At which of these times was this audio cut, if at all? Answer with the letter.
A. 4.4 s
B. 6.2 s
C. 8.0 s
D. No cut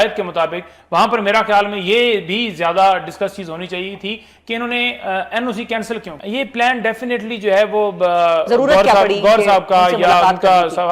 B